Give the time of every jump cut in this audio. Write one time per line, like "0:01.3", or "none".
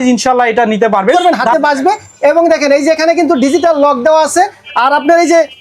0:01.1